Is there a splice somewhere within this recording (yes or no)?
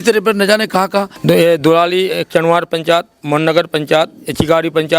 yes